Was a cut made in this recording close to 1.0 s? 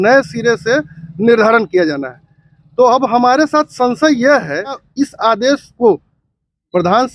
no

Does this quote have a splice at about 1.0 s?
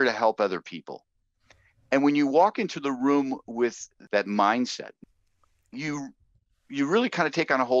no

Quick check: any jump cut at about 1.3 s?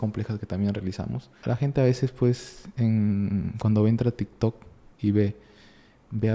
yes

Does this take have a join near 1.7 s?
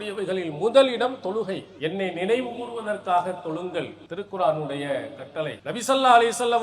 yes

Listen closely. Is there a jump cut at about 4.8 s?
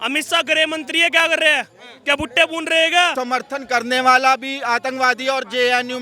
no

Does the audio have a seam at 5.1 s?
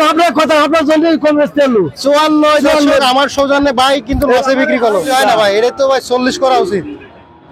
yes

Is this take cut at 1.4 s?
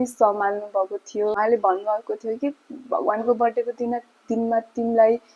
yes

